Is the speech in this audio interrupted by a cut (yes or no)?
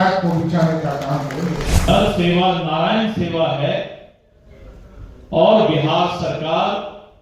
yes